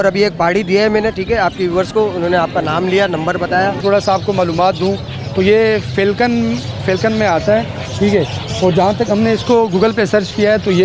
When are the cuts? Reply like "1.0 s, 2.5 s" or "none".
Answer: 3.8 s

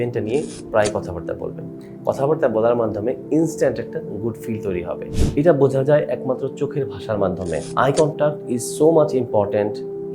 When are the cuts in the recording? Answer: 5.1 s

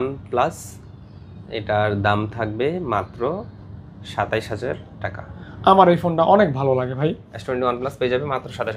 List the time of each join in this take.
none

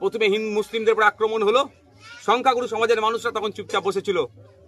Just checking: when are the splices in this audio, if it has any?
none

